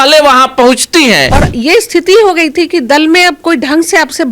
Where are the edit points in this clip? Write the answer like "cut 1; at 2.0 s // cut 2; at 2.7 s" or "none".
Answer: cut 1; at 1.4 s